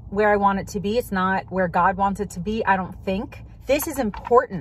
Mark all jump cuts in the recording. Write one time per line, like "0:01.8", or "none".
0:03.4